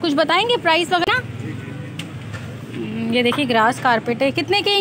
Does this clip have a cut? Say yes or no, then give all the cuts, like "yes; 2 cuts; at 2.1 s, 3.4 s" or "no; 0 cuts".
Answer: yes; 1 cut; at 1.1 s